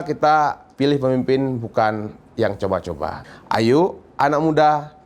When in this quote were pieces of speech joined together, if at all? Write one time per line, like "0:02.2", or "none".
0:03.3

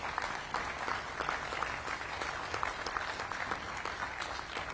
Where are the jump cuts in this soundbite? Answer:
none

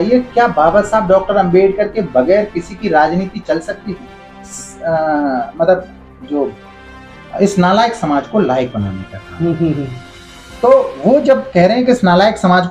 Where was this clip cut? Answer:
0:04.5

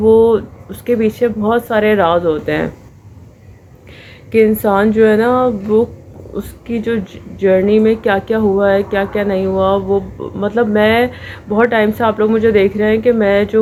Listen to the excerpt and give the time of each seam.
none

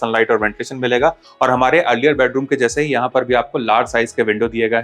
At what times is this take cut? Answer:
0:01.3

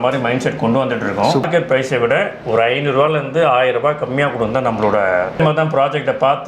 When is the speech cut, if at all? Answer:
0:01.4
0:05.4

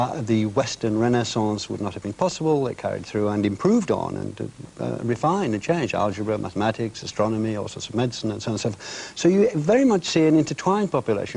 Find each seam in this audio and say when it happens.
0:05.9

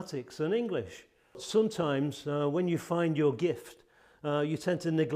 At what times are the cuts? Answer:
0:01.4

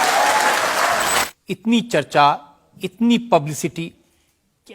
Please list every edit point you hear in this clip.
0:01.3

